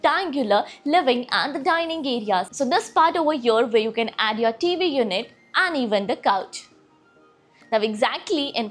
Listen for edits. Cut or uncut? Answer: uncut